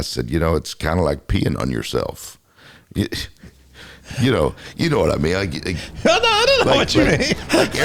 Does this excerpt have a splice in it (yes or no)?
no